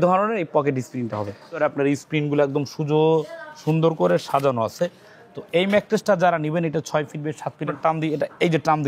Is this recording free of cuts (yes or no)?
no